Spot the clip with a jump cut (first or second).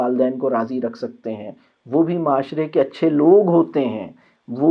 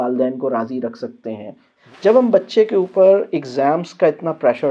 second